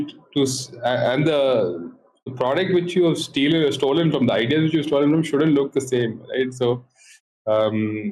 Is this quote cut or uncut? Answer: uncut